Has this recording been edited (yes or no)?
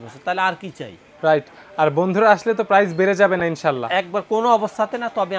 no